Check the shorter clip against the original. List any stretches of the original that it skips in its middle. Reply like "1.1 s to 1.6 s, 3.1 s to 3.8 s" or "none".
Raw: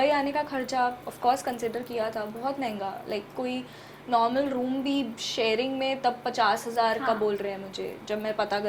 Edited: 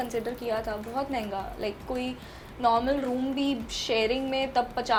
none